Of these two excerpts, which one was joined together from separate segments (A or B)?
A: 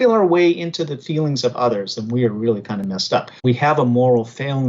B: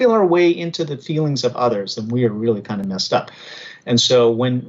A